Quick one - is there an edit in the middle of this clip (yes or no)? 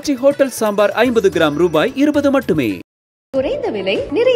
no